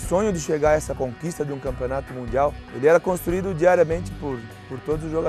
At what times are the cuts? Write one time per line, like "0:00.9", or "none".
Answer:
0:00.9
0:02.6